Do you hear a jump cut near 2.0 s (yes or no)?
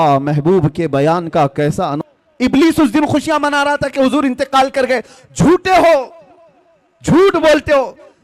yes